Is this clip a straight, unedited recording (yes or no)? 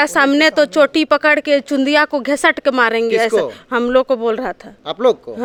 yes